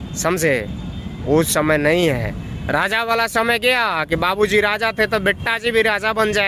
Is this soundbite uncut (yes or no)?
yes